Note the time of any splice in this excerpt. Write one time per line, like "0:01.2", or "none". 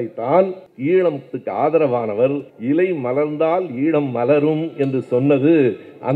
none